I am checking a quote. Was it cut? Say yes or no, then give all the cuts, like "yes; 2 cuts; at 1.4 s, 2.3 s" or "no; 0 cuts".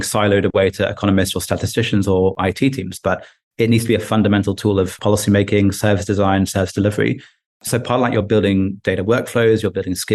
yes; 2 cuts; at 2.4 s, 4.9 s